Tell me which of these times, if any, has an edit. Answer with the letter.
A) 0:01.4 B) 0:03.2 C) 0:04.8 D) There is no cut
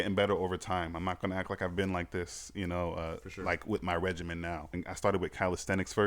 C